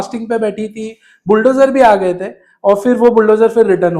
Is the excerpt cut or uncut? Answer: uncut